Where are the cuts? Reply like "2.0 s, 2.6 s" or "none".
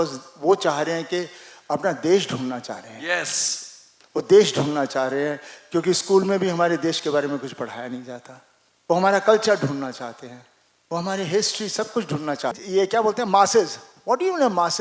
12.6 s